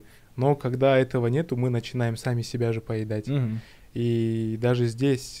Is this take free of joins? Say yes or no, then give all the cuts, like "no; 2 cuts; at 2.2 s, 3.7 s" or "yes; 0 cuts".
yes; 0 cuts